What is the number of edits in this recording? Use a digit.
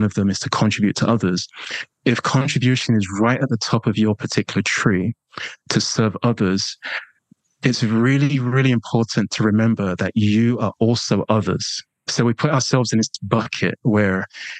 1